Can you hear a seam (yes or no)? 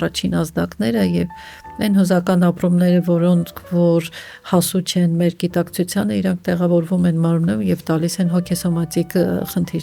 no